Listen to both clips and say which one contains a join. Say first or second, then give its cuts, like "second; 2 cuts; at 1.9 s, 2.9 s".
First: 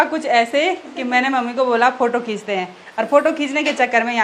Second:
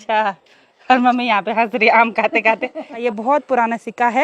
second; 1 cut; at 3.0 s